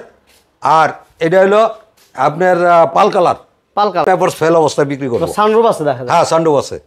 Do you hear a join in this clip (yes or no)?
yes